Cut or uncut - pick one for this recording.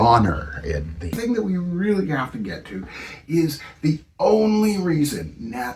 cut